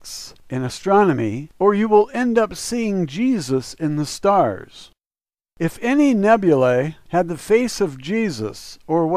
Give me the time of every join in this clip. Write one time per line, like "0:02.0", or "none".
0:02.4